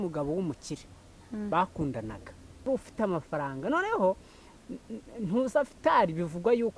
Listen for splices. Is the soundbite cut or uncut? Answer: cut